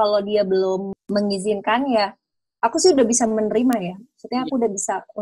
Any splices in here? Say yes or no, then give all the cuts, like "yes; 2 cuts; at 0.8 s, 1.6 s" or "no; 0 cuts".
yes; 1 cut; at 1.0 s